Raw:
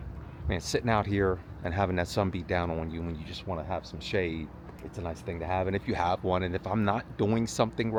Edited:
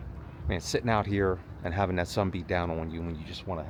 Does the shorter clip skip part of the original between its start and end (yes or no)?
no